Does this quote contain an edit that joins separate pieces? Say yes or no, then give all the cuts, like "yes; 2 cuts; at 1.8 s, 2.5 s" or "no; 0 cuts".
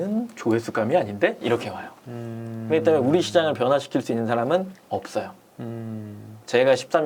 no; 0 cuts